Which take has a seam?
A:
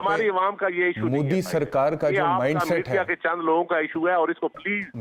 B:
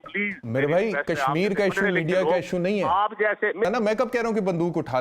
B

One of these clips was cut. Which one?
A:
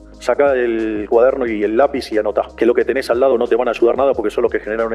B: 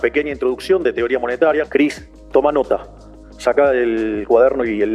B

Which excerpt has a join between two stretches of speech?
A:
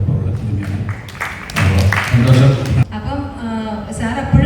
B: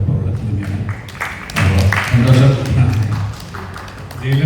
A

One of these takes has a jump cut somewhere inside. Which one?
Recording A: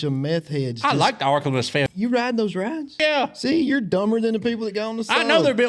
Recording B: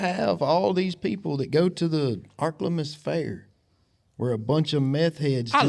A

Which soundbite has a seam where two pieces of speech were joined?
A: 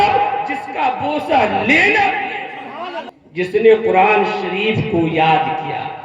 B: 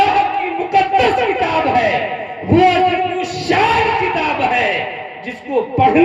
A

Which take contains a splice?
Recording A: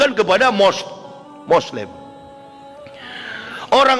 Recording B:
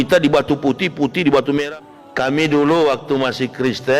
B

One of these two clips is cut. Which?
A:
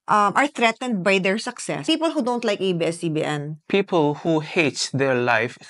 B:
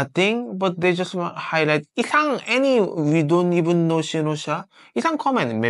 A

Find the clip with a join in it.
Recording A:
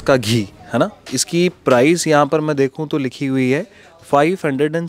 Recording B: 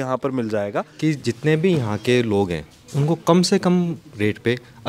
B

